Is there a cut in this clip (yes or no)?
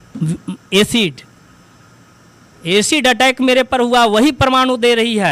no